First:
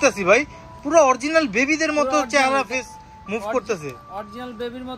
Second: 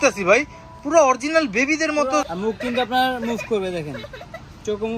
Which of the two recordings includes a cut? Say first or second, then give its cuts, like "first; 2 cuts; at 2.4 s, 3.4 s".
second; 1 cut; at 2.3 s